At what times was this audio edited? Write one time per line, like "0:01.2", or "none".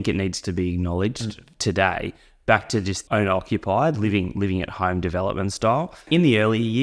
0:03.0